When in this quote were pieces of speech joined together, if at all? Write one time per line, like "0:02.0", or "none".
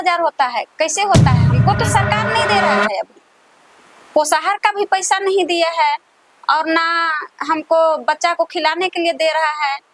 none

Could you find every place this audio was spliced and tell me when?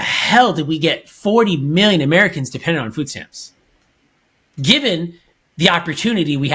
none

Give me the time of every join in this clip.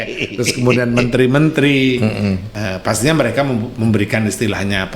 0:02.5

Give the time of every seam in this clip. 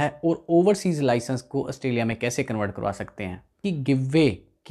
0:03.6

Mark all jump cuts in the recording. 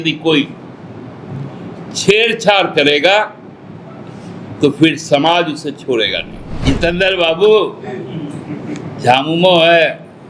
0:06.6

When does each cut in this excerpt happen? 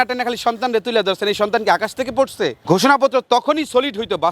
0:02.6

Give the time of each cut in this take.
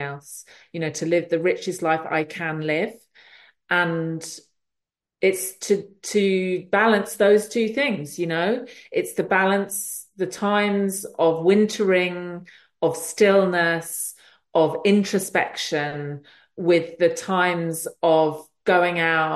none

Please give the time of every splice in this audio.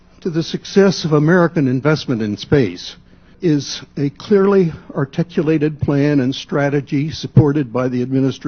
0:03.3

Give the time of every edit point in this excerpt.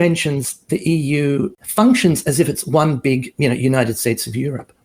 0:01.6

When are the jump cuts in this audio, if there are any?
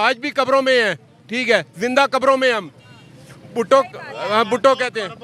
none

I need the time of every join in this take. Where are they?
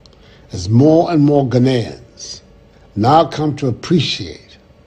none

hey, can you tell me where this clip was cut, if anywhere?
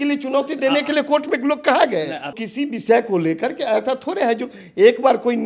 0:02.3

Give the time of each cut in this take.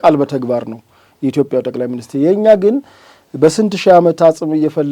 none

